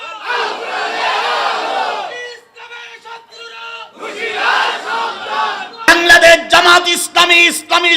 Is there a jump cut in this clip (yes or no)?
yes